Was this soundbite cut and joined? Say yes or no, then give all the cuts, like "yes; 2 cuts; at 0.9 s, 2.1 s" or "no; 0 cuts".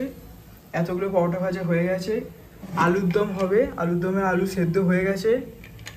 no; 0 cuts